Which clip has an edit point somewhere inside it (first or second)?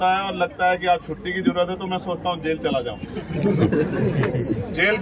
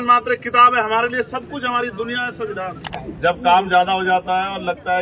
second